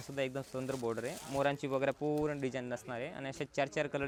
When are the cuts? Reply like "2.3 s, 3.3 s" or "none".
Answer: none